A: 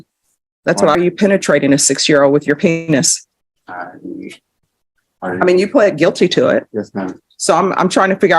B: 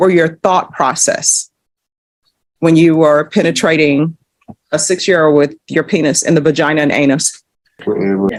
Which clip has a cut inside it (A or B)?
A